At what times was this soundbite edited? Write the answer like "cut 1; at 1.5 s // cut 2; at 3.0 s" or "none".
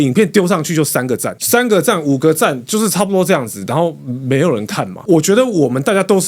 cut 1; at 5.0 s

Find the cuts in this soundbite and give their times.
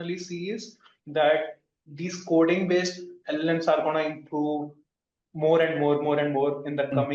none

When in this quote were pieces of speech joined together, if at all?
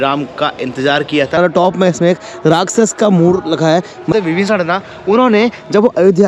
cut 1; at 1.4 s // cut 2; at 4.1 s

